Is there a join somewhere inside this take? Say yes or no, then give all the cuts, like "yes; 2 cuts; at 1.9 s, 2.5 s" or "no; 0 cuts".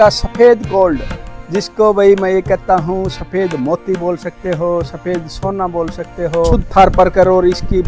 yes; 1 cut; at 6.6 s